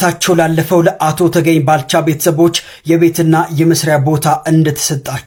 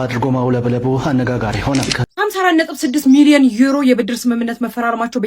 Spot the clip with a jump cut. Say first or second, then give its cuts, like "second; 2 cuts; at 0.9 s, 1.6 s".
second; 1 cut; at 2.0 s